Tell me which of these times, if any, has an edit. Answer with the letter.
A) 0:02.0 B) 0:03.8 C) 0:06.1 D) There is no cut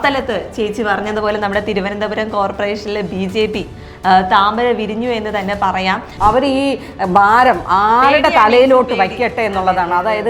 C